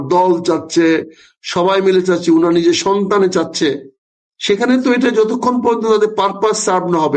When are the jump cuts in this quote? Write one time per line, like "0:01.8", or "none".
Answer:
none